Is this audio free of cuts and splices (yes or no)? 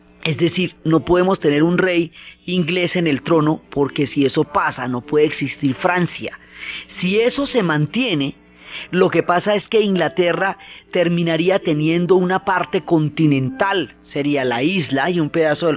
yes